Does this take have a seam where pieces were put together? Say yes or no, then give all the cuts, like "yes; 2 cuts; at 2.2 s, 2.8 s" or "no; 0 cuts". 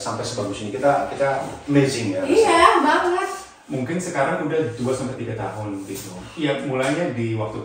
no; 0 cuts